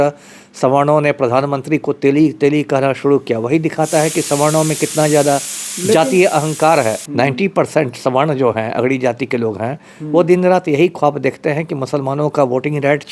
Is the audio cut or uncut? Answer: cut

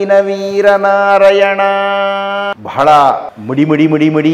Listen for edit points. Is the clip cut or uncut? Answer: cut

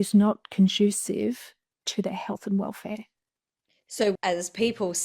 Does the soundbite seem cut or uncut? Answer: cut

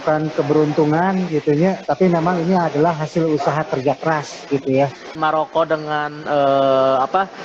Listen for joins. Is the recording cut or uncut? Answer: cut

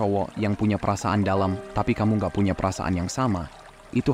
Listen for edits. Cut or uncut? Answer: uncut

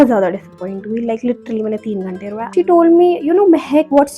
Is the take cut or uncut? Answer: cut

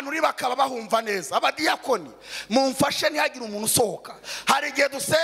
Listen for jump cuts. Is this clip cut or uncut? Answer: uncut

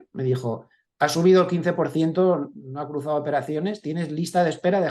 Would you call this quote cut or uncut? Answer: uncut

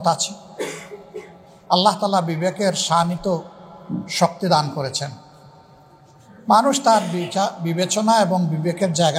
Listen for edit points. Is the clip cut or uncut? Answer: uncut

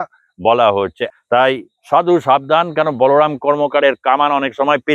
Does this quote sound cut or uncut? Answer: cut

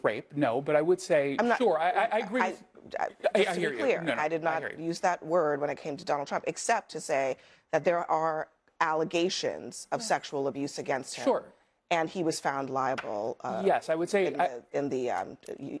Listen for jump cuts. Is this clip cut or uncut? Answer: uncut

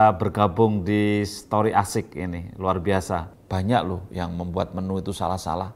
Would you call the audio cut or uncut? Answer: cut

